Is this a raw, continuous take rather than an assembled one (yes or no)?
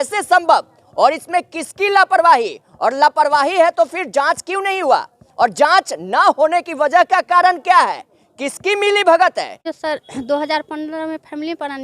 no